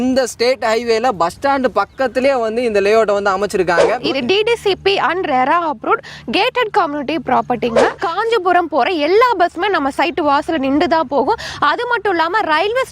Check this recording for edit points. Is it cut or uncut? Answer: cut